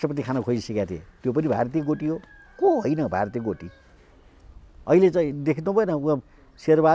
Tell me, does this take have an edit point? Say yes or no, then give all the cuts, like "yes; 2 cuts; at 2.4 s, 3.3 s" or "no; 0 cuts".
no; 0 cuts